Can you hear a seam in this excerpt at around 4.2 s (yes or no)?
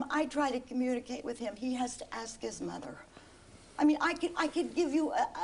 yes